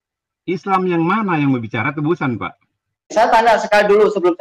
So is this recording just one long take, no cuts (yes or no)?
no